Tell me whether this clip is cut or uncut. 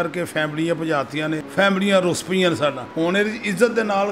cut